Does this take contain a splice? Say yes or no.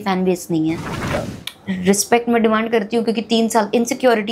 yes